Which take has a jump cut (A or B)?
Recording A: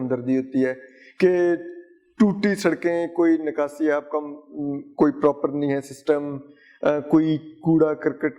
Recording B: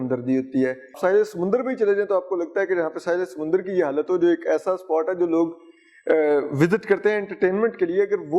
B